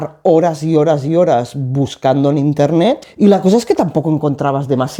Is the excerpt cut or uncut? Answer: cut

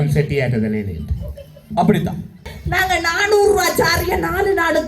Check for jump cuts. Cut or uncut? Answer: cut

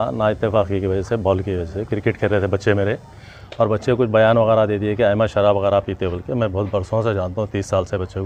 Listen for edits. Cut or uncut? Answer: uncut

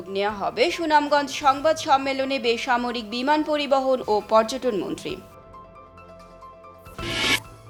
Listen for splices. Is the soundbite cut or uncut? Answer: uncut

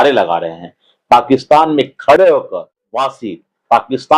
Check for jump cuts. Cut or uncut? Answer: cut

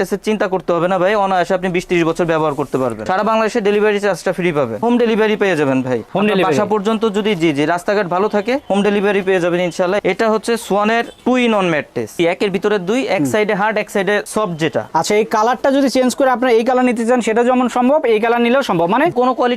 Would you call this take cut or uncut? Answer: cut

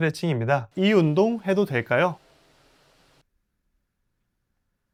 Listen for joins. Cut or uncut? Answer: uncut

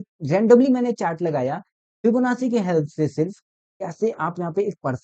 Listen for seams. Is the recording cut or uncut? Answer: uncut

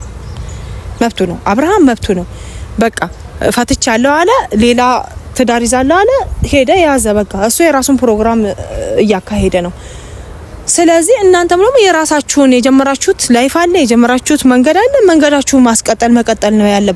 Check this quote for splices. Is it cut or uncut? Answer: uncut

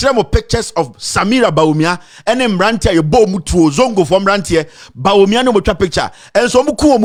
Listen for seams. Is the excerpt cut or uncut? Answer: uncut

